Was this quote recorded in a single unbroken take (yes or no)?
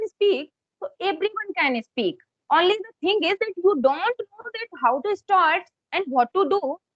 yes